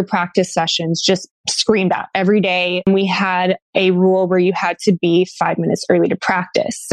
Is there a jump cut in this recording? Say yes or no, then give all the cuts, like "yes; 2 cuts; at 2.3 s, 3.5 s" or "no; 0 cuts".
yes; 1 cut; at 2.8 s